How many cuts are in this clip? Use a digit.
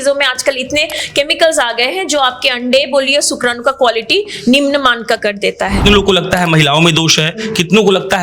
1